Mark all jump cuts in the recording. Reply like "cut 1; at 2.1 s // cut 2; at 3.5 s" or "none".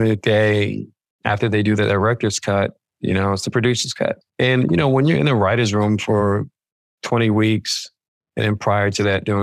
cut 1; at 4.3 s